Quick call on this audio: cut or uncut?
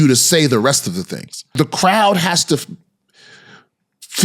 cut